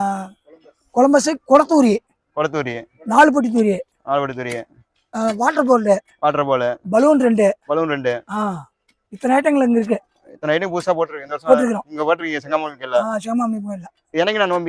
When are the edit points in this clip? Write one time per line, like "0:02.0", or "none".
none